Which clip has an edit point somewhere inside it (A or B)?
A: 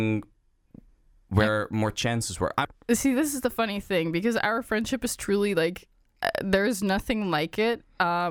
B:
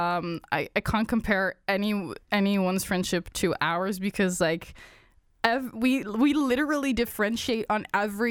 A